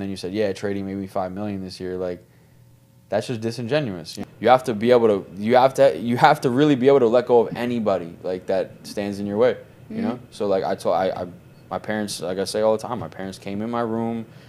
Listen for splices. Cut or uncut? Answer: cut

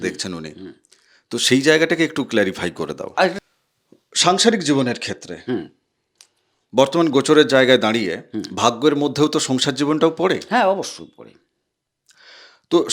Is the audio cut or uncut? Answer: cut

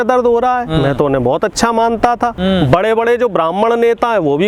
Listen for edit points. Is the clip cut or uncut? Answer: cut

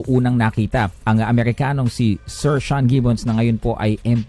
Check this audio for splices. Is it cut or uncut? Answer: cut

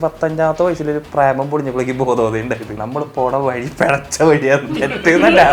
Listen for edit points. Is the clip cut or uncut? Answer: cut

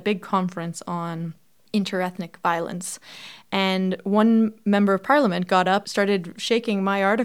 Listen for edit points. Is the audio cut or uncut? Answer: cut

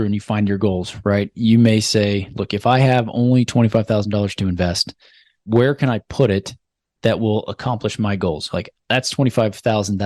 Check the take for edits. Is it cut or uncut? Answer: uncut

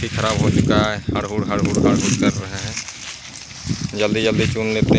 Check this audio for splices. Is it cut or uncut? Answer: uncut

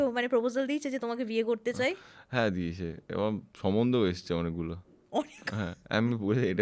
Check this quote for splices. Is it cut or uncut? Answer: uncut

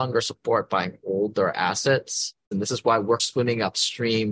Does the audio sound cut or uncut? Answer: cut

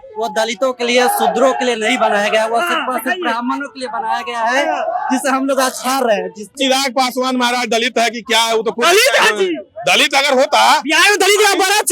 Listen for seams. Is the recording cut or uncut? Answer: cut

